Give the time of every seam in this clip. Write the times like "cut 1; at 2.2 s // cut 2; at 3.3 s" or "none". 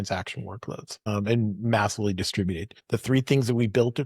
cut 1; at 1.1 s // cut 2; at 2.7 s